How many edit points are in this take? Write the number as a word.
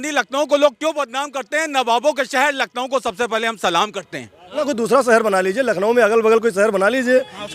one